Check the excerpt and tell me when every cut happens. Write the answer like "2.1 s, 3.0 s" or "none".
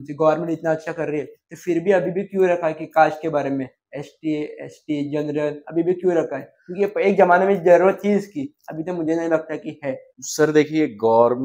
none